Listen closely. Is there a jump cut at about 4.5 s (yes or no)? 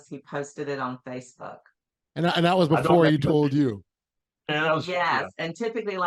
no